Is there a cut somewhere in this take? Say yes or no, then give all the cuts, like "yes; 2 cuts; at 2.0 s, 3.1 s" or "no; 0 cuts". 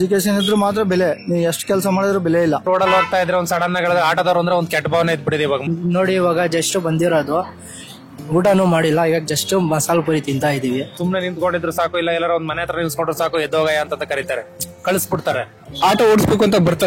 yes; 4 cuts; at 2.6 s, 5.7 s, 11.0 s, 15.6 s